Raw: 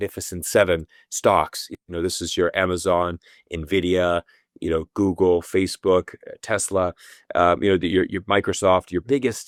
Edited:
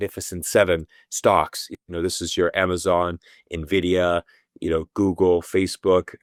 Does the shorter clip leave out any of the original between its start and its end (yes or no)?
no